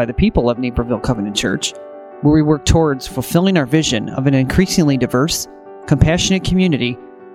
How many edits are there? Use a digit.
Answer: 0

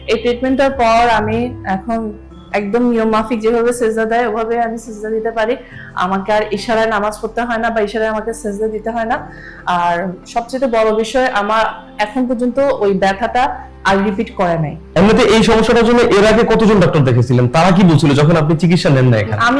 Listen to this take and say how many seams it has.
1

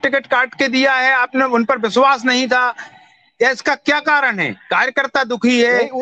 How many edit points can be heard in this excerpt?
0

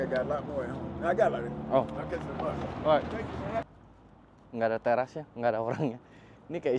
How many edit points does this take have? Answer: 1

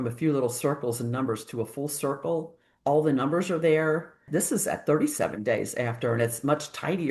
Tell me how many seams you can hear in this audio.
1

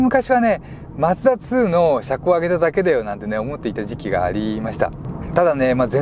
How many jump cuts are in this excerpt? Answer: 1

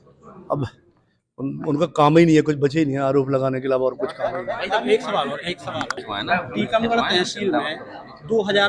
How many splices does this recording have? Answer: 1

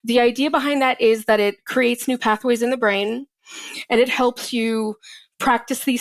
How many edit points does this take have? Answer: 0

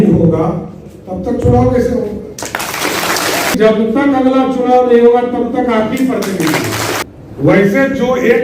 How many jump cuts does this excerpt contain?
2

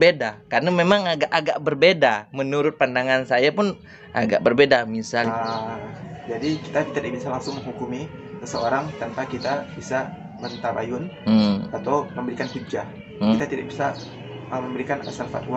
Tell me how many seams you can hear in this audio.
2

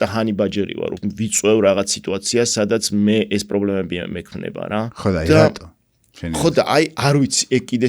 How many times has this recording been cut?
2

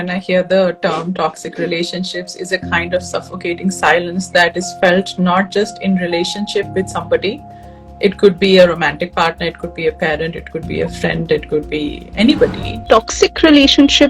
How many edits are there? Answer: 1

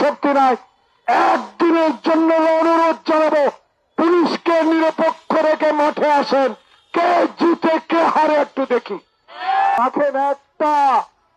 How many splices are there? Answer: 1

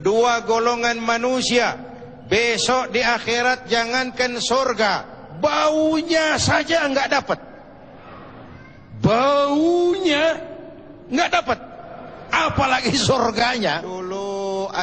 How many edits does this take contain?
1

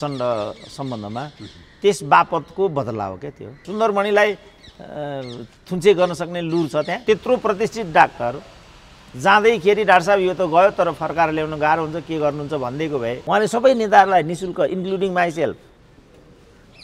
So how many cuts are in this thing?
3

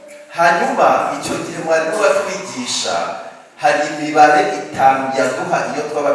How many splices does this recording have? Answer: 0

